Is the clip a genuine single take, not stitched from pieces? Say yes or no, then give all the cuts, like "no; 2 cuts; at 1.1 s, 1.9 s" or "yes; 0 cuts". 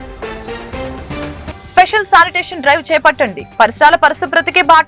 no; 1 cut; at 1.4 s